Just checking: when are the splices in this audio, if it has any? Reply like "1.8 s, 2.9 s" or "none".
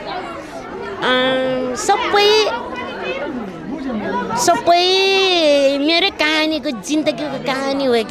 none